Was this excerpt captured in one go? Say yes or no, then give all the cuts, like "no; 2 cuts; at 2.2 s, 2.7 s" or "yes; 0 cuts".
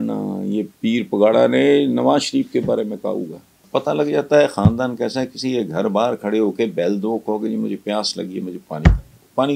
no; 1 cut; at 3.6 s